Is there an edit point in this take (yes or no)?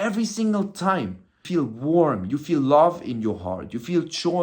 yes